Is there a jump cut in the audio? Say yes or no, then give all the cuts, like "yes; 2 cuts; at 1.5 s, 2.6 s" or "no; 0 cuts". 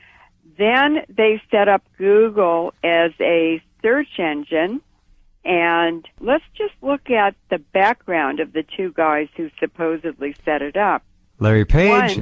yes; 1 cut; at 4.8 s